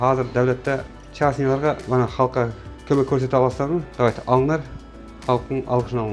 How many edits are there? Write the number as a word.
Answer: two